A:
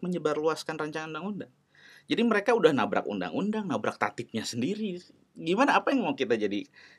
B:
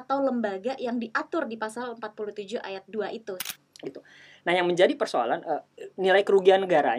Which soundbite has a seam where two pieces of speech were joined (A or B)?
B